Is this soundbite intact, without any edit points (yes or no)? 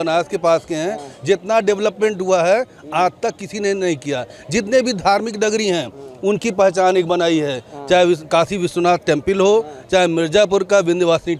yes